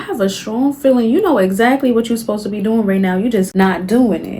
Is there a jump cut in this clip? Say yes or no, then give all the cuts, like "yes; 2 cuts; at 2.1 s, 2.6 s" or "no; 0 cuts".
yes; 1 cut; at 3.5 s